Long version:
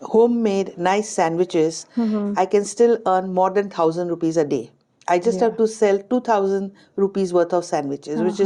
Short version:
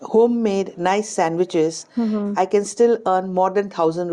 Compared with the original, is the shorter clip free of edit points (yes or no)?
yes